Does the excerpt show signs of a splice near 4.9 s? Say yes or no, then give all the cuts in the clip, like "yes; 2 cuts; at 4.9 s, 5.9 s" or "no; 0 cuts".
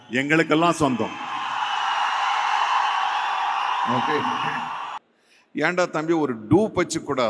yes; 1 cut; at 4.9 s